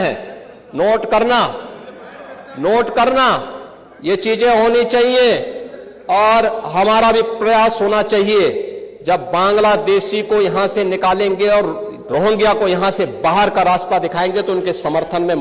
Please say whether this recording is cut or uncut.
uncut